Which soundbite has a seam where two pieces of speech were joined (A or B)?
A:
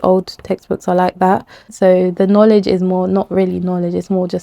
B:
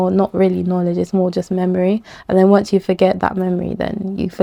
A